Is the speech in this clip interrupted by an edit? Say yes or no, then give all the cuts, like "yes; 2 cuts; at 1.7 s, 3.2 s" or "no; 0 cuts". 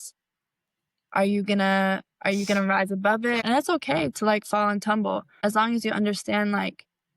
yes; 2 cuts; at 3.4 s, 5.3 s